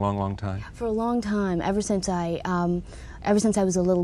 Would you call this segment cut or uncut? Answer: uncut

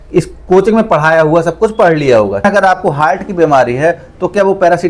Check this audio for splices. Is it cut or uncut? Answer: cut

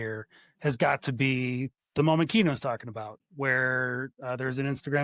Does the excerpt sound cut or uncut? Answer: cut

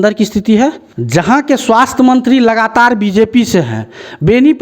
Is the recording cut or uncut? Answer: cut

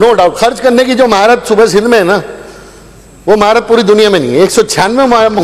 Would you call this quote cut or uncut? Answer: uncut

